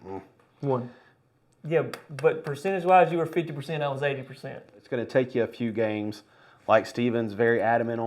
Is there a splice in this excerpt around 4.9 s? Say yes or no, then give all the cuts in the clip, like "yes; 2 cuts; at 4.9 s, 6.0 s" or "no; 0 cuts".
yes; 1 cut; at 4.9 s